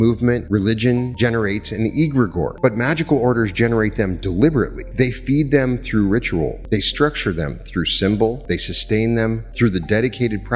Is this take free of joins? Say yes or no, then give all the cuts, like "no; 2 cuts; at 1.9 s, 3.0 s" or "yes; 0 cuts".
no; 6 cuts; at 0.8 s, 2.5 s, 4.8 s, 6.6 s, 8.4 s, 9.5 s